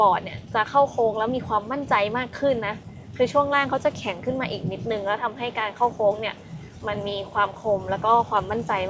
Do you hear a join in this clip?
no; 0 cuts

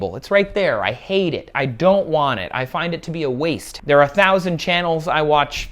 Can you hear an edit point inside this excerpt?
yes; 1 cut; at 3.7 s

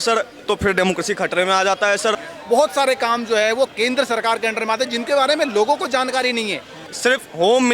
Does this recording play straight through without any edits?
no; 2 cuts; at 2.3 s, 6.9 s

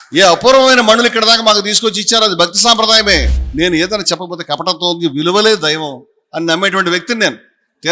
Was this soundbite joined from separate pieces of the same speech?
yes; 1 cut; at 3.3 s

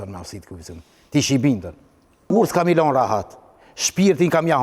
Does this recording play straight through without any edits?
no; 1 cut; at 2.3 s

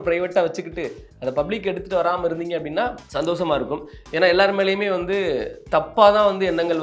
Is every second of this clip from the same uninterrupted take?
no; 1 cut; at 3.0 s

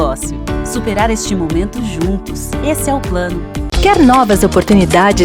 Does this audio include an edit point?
yes; 1 cut; at 3.7 s

